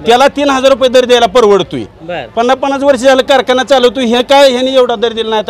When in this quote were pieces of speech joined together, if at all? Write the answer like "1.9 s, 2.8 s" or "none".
none